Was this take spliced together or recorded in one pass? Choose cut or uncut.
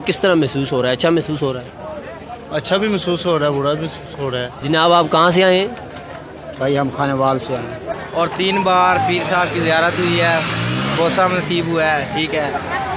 cut